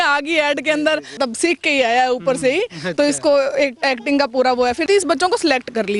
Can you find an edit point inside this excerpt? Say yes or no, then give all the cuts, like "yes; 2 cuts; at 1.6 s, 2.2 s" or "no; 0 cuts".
yes; 2 cuts; at 1.2 s, 4.8 s